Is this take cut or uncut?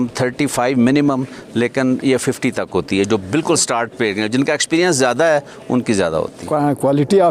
cut